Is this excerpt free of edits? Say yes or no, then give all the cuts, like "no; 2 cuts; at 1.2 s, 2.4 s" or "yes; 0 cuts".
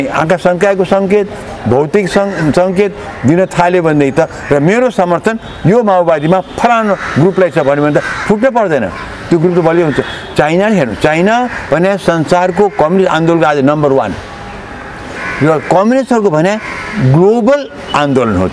yes; 0 cuts